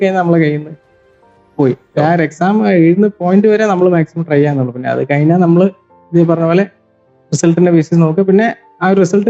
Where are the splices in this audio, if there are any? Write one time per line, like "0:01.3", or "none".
none